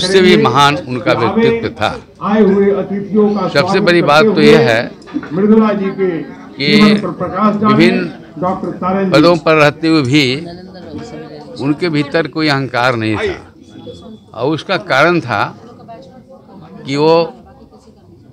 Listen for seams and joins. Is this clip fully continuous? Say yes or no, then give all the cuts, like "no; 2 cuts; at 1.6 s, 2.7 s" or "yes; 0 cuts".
yes; 0 cuts